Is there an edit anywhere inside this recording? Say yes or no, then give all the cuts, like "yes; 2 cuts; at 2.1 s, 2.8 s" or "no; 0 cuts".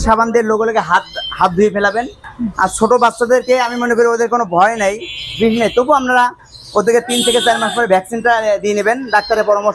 no; 0 cuts